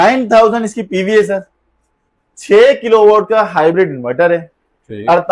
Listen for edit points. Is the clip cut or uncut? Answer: uncut